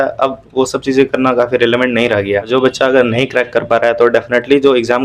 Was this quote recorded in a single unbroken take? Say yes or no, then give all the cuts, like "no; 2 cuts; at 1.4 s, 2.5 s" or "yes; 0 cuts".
no; 1 cut; at 2.5 s